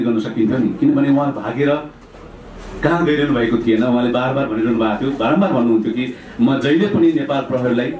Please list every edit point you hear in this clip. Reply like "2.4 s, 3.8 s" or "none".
none